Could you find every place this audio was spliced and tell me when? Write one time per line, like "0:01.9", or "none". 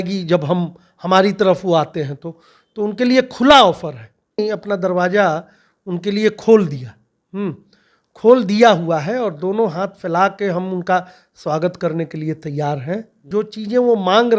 0:04.4
0:13.2